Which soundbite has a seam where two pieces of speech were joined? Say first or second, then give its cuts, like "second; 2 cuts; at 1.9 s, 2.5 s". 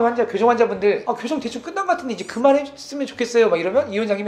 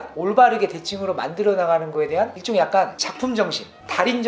first; 1 cut; at 1.0 s